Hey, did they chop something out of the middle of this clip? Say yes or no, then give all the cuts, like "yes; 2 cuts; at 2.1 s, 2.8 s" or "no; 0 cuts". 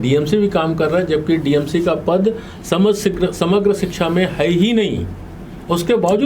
no; 0 cuts